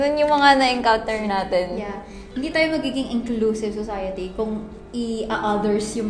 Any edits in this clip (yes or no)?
no